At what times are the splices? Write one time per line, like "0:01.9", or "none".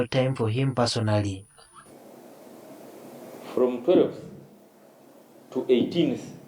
0:01.3